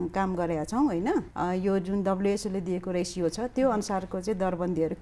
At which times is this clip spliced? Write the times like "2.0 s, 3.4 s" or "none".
1.3 s